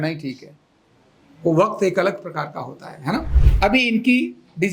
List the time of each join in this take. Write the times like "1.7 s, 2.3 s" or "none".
3.4 s